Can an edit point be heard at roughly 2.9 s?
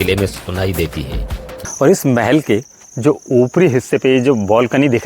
no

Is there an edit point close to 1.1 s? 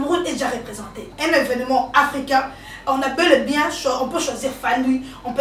yes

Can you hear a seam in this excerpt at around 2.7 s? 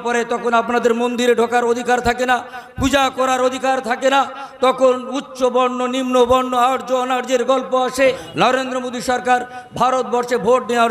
no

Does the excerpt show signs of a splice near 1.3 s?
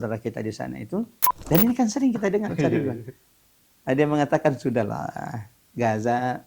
yes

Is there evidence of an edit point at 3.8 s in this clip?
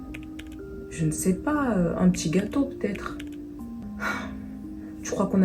yes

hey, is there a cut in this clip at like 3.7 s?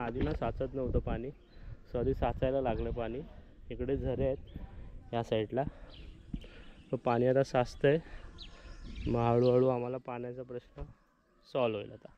no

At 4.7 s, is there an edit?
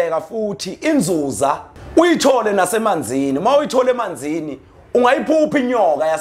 no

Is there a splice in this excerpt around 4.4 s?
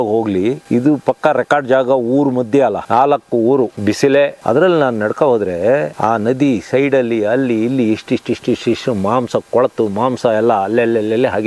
yes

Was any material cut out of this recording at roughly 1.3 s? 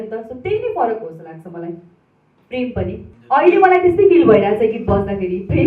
no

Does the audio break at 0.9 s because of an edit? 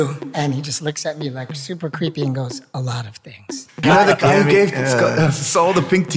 no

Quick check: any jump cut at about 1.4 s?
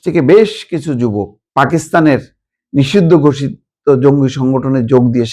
yes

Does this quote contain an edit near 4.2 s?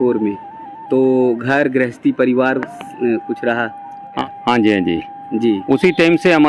yes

